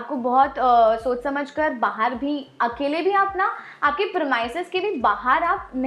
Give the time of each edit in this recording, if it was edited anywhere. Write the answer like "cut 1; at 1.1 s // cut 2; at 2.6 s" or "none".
none